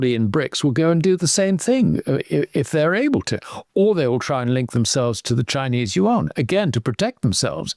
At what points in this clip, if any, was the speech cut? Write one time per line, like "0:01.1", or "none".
none